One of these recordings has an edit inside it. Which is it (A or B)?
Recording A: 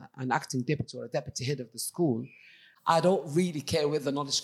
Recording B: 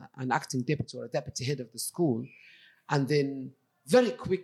A